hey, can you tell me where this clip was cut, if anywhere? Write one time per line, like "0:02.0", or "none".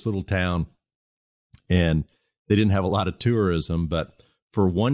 none